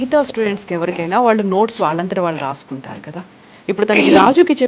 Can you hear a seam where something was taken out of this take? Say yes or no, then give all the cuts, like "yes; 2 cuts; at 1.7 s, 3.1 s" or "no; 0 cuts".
no; 0 cuts